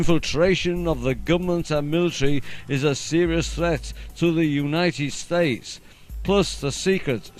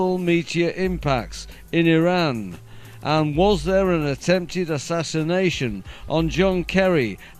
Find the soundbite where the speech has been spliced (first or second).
second